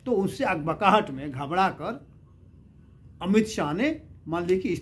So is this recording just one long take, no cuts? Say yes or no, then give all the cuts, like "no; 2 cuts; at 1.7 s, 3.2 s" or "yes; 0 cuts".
yes; 0 cuts